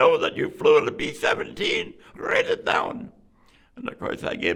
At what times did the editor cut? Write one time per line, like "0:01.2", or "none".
none